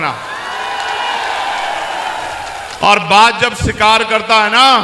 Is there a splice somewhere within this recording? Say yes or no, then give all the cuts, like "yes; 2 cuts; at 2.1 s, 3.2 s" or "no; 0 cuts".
no; 0 cuts